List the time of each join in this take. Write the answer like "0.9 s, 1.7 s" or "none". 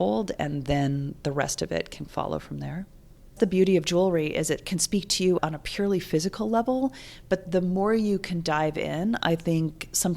3.3 s